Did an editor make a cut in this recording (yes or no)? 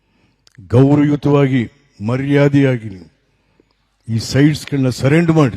no